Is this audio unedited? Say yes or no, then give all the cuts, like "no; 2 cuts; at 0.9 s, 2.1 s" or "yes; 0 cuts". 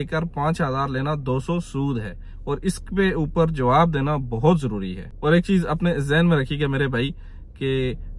no; 1 cut; at 5.1 s